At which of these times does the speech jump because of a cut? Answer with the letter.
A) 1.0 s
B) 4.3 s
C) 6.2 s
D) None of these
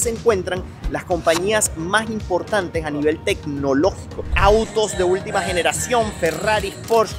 B